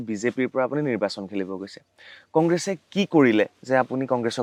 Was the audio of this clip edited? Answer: no; 0 cuts

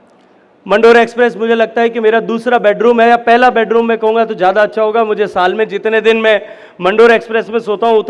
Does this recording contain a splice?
no; 0 cuts

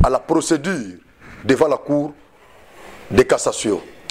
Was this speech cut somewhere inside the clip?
no; 0 cuts

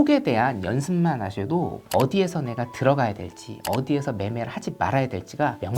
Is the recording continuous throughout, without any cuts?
yes; 0 cuts

